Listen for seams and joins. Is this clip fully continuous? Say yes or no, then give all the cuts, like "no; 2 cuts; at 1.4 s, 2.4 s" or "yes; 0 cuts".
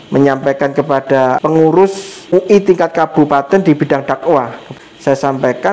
no; 3 cuts; at 1.4 s, 2.3 s, 4.7 s